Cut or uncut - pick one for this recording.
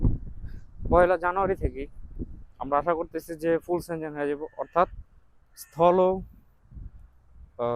uncut